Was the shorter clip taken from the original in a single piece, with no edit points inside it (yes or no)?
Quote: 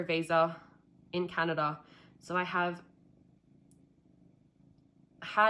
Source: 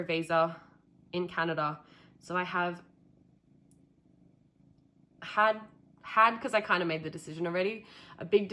yes